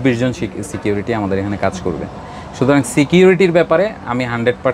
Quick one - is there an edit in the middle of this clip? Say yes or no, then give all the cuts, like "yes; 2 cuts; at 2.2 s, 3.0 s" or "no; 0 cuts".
no; 0 cuts